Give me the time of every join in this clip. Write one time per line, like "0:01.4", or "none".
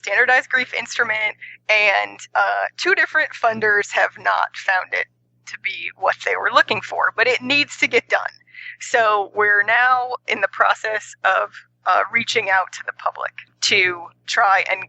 0:13.7